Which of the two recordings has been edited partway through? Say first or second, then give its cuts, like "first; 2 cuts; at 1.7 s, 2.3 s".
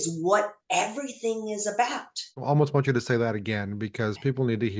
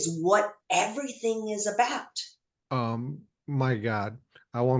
first; 1 cut; at 2.3 s